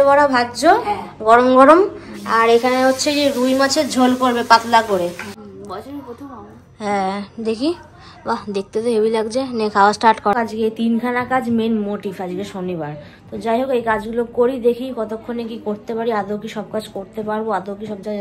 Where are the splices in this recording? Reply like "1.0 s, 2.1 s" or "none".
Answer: 5.4 s, 10.3 s